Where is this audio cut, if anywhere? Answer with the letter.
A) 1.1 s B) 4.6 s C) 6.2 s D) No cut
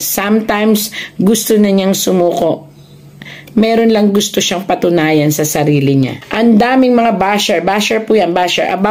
C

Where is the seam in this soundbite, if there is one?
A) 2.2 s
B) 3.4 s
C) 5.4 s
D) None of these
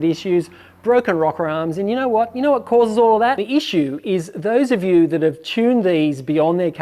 D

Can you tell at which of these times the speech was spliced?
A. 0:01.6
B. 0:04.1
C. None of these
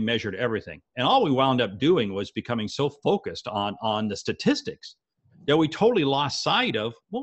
C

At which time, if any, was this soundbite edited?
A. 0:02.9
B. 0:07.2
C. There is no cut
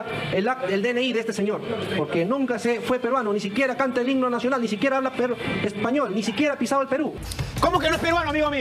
B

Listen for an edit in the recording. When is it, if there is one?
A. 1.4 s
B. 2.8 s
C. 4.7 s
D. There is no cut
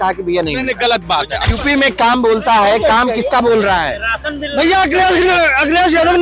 A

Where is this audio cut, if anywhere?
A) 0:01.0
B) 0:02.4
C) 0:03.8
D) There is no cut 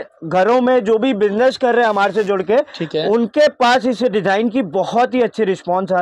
D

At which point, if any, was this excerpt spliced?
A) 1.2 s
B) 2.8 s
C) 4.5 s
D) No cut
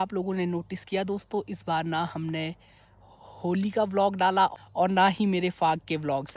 C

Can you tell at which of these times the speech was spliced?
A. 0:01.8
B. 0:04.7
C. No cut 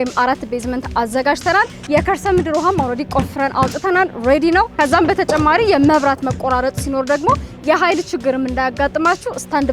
A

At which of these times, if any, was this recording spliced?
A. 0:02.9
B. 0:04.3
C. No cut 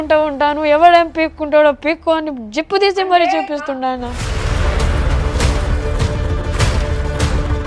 B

